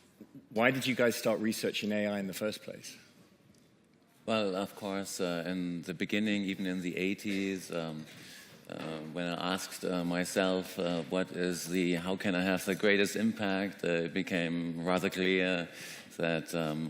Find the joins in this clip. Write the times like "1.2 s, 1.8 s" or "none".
3.8 s

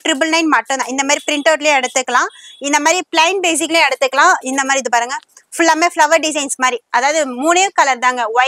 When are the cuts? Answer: none

